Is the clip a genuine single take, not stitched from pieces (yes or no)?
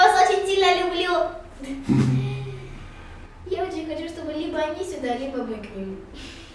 yes